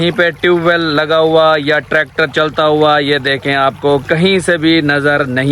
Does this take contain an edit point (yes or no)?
no